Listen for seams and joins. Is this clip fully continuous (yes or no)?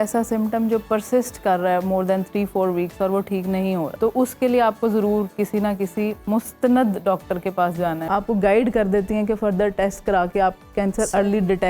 no